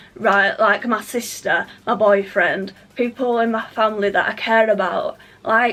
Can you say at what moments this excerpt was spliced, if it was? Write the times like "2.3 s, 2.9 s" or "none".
none

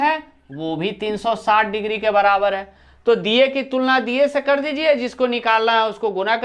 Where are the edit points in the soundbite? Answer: none

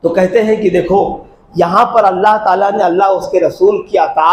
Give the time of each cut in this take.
none

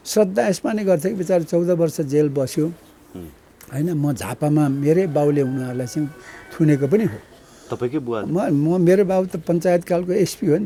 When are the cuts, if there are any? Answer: none

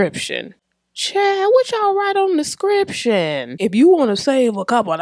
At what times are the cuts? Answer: 3.5 s

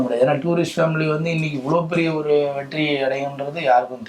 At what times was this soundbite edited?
none

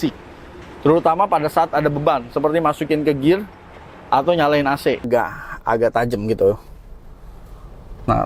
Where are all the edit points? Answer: 5.1 s

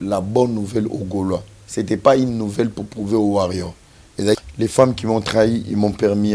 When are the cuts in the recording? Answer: 4.4 s

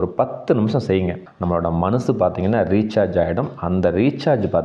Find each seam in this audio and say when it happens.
1.3 s

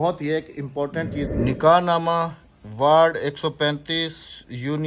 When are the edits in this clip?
1.3 s

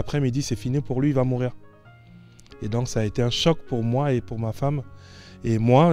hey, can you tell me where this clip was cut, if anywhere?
none

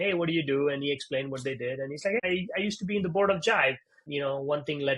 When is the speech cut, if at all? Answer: 2.2 s, 4.0 s

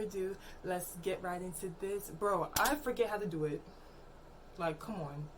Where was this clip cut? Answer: none

